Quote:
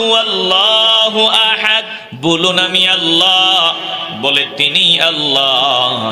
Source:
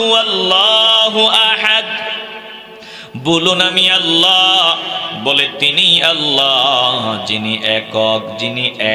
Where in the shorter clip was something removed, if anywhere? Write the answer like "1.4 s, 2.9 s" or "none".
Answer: 2.0 s